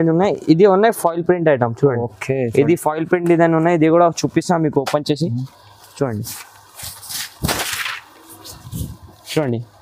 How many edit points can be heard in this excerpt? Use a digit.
0